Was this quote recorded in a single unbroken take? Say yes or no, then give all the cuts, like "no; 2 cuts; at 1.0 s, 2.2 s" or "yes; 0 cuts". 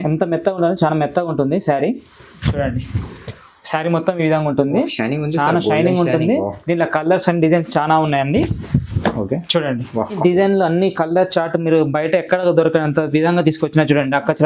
no; 1 cut; at 10.2 s